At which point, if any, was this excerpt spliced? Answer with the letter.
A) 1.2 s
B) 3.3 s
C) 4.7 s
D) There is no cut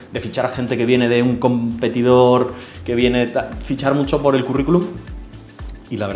D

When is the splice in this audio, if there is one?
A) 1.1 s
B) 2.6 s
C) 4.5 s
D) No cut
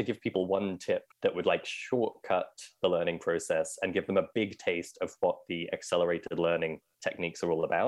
A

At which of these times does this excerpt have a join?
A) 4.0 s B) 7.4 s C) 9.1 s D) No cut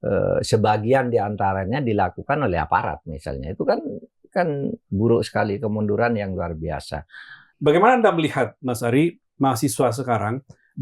B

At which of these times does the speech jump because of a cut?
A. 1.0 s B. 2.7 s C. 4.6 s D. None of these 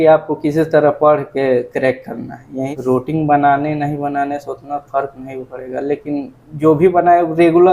B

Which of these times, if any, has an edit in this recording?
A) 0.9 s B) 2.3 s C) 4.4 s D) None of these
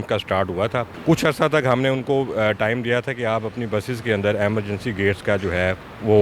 A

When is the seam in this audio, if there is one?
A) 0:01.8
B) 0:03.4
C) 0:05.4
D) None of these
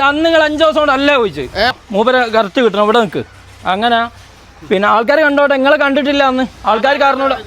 A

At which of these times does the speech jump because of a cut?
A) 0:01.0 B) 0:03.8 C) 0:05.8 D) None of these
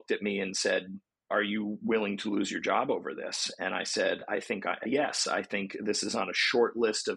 A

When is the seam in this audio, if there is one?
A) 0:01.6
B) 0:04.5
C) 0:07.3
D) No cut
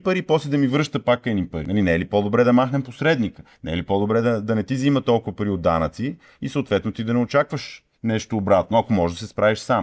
A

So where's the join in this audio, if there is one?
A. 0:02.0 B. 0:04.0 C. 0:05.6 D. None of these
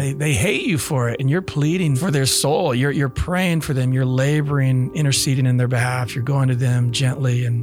A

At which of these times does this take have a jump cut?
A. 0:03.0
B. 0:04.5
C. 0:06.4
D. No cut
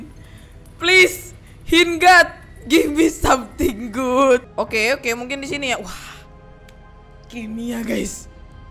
B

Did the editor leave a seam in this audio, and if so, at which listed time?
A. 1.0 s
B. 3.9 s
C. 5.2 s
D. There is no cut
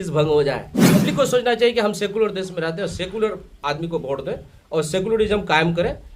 A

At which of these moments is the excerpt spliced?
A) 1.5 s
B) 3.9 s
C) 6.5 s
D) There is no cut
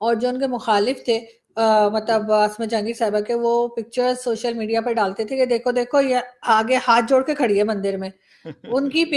D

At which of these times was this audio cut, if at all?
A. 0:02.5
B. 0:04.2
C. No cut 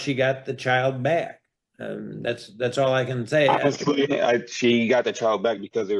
C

